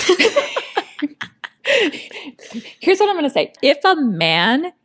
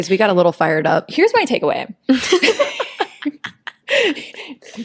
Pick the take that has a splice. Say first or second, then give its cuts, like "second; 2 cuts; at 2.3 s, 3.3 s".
first; 1 cut; at 3.6 s